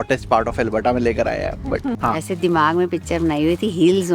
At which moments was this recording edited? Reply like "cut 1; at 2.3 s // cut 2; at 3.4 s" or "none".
cut 1; at 2.0 s